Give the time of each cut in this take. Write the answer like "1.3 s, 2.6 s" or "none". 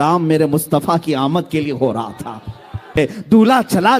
3.0 s